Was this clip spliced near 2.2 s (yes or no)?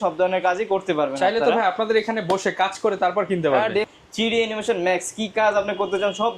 no